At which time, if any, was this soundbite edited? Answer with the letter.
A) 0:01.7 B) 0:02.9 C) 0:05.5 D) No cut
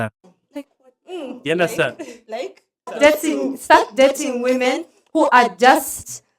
B